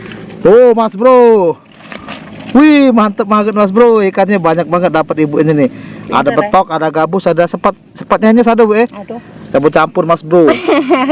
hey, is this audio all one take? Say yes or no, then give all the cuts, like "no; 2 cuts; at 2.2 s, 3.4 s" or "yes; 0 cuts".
yes; 0 cuts